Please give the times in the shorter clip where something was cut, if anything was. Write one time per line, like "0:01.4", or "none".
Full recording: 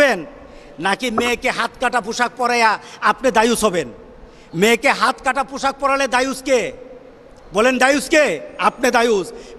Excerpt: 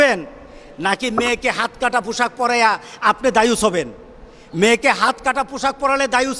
none